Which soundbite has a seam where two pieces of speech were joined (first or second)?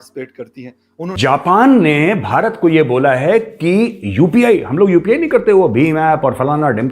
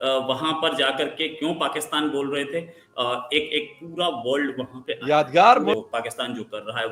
first